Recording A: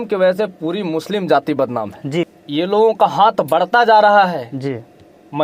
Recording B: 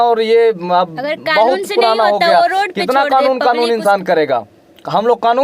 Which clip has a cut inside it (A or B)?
A